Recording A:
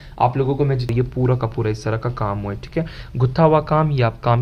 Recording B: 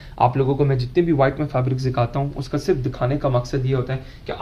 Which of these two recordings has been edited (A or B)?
A